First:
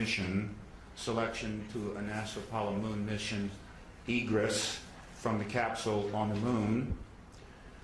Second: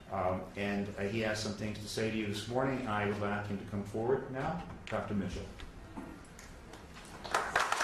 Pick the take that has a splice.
second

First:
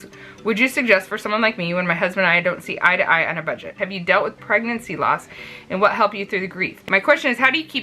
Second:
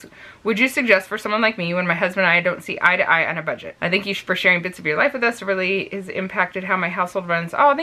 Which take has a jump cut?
first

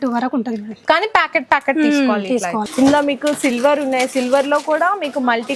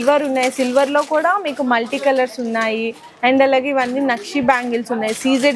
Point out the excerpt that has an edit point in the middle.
first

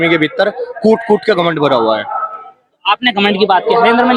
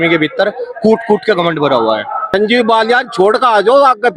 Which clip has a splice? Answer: second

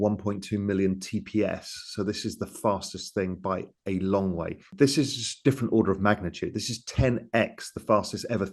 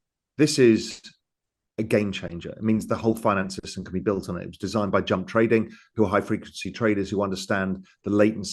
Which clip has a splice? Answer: first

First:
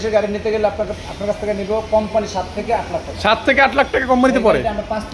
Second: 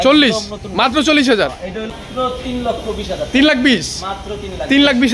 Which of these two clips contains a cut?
second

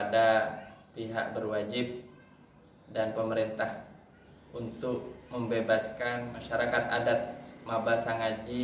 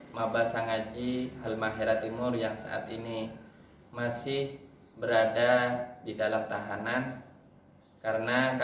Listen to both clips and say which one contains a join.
first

